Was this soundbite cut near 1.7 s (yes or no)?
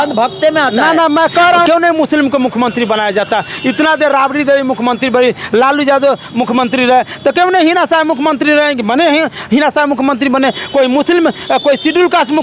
yes